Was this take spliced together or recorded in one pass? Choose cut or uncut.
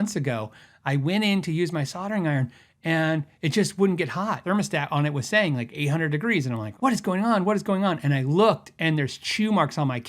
cut